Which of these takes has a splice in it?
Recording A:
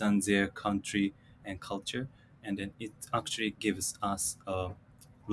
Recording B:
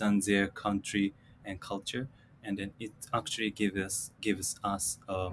A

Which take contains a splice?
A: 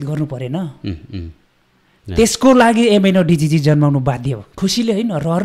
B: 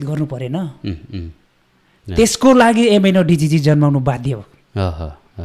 A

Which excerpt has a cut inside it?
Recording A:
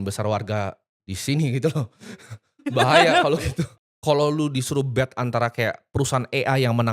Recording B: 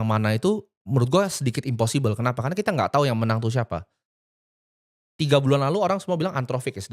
A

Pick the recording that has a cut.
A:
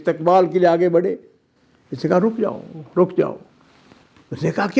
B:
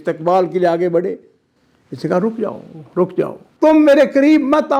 B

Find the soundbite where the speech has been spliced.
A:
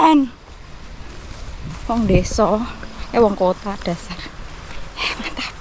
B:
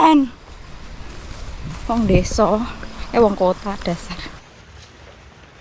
B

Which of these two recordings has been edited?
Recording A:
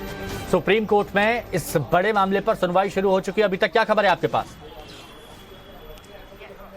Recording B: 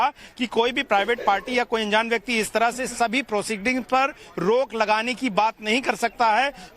A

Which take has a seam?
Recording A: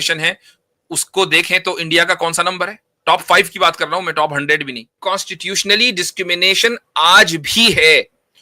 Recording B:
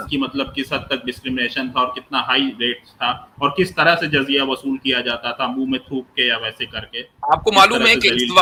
A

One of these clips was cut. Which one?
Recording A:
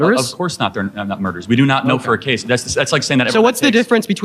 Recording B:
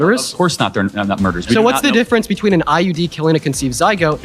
B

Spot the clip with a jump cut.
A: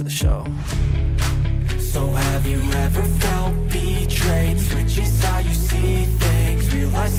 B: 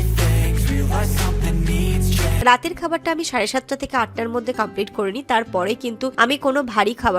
B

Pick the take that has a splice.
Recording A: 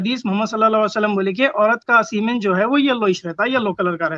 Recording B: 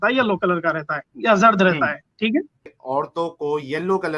B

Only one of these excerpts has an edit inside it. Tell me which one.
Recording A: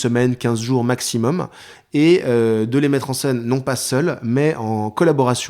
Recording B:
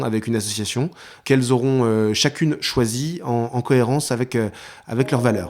B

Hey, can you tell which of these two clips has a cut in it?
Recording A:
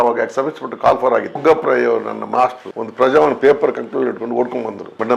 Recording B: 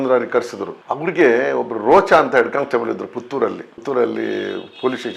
A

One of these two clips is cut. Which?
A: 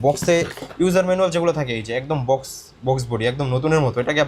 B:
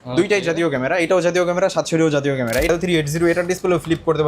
B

